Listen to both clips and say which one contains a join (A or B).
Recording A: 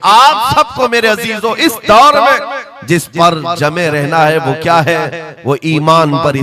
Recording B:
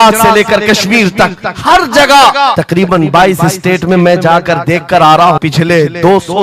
B